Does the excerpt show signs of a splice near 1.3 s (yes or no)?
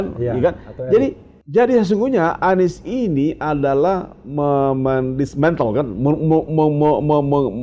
yes